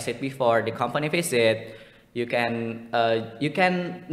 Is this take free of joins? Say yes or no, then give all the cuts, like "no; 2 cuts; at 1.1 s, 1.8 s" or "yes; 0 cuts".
yes; 0 cuts